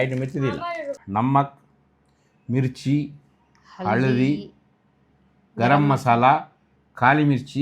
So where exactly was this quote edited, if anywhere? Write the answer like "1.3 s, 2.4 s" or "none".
1.0 s